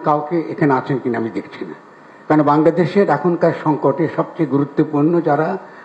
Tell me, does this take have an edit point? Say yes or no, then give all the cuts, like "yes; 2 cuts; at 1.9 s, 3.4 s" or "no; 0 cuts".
no; 0 cuts